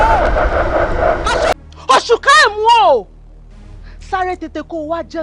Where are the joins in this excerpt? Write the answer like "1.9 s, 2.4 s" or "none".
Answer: 1.5 s